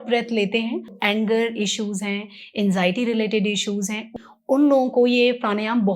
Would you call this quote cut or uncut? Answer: cut